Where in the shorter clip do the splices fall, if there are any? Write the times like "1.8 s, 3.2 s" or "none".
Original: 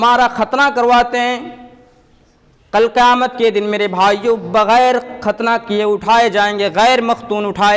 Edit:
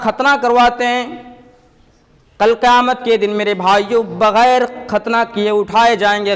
none